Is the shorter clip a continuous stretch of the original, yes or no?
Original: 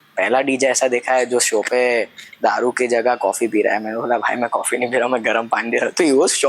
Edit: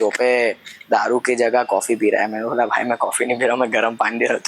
yes